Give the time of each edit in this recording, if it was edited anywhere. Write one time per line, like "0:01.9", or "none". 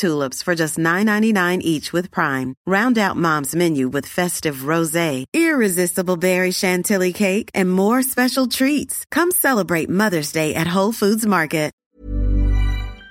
0:11.9